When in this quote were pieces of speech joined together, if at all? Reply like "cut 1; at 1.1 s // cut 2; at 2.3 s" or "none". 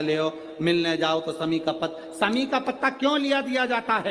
none